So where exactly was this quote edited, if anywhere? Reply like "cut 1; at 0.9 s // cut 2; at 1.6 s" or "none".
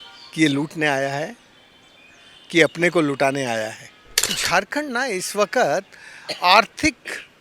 cut 1; at 4.4 s